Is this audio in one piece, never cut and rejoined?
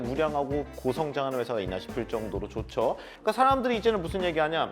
no; 1 cut; at 3.1 s

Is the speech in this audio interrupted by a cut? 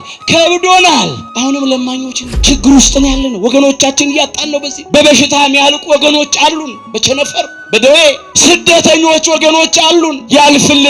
yes; 1 cut; at 2.3 s

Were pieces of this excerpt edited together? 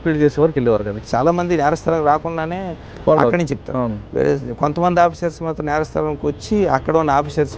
yes; 1 cut; at 1.0 s

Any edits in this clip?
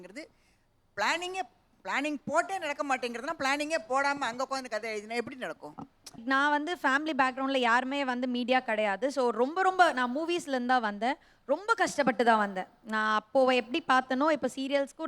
yes; 1 cut; at 6.1 s

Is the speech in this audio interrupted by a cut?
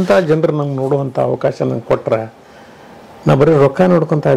no; 0 cuts

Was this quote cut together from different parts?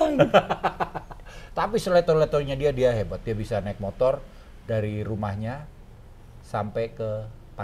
no; 0 cuts

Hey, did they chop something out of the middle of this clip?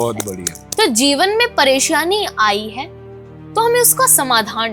no; 0 cuts

